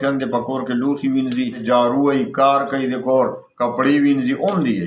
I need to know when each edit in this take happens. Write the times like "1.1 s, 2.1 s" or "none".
1.6 s